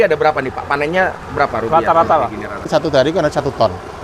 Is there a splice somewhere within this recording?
yes; 1 cut; at 2.6 s

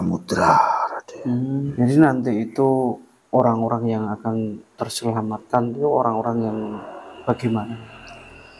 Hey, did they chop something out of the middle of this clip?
yes; 1 cut; at 1.7 s

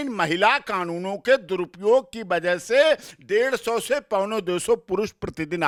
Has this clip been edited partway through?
no; 0 cuts

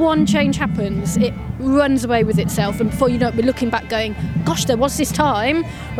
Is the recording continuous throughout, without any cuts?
yes; 0 cuts

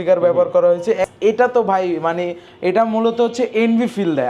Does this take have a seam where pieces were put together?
yes; 1 cut; at 1.1 s

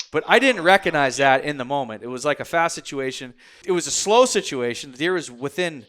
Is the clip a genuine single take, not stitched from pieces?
no; 1 cut; at 3.6 s

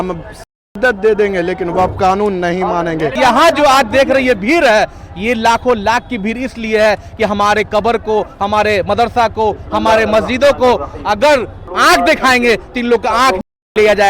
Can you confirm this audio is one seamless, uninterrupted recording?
no; 2 cuts; at 3.2 s, 11.6 s

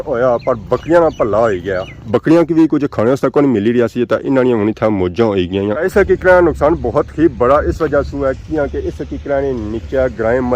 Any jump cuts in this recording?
yes; 1 cut; at 5.8 s

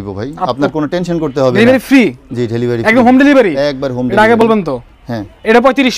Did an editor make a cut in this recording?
no; 0 cuts

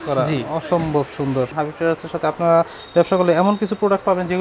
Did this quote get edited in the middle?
yes; 1 cut; at 1.5 s

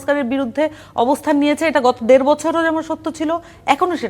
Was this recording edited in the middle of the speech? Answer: no; 0 cuts

